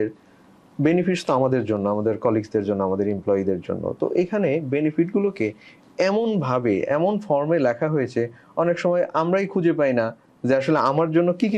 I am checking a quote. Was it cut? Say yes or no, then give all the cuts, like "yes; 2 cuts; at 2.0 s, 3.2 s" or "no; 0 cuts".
no; 0 cuts